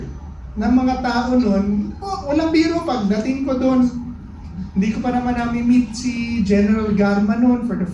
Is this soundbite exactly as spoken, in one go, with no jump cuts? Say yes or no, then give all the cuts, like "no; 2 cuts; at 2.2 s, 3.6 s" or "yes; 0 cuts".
yes; 0 cuts